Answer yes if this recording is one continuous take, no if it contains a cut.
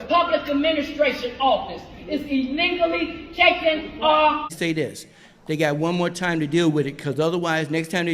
no